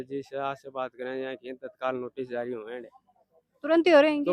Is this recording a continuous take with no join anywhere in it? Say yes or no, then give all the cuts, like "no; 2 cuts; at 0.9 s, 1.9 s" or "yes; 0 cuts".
yes; 0 cuts